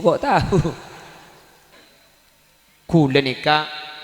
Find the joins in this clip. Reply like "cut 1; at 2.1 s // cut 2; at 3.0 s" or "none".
cut 1; at 1.7 s